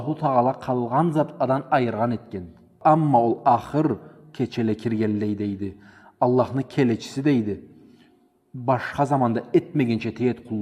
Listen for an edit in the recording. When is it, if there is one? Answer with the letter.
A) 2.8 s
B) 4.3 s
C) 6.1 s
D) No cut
A